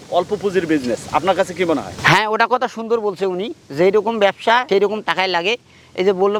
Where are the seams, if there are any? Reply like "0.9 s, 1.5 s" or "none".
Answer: none